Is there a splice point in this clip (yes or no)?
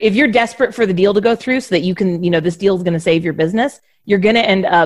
no